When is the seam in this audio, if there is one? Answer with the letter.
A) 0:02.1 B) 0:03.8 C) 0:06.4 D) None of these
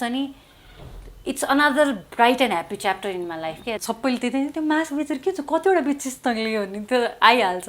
B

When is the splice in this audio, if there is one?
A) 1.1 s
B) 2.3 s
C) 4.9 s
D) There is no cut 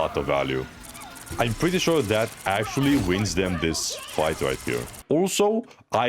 C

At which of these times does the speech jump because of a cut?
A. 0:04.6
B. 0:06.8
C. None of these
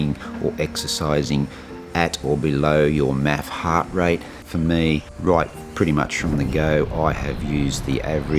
A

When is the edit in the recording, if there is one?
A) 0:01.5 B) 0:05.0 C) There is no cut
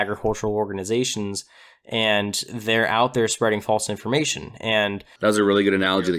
B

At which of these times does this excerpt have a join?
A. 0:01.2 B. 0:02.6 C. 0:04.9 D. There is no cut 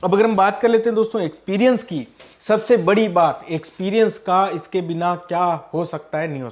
D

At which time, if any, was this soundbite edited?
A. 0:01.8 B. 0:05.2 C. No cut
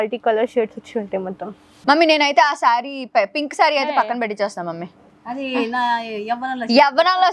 A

